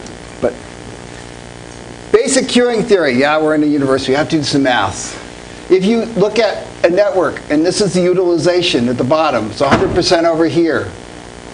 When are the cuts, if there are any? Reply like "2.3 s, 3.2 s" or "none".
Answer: 4.4 s